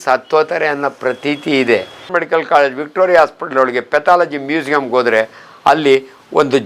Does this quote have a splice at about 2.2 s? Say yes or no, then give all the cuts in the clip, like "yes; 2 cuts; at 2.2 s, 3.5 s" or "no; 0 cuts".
yes; 1 cut; at 2.2 s